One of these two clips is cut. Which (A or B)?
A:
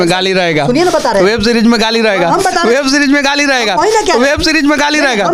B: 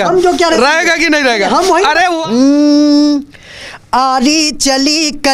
B